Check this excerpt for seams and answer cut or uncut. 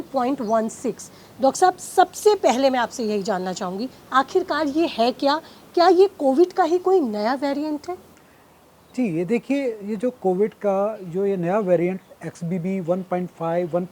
uncut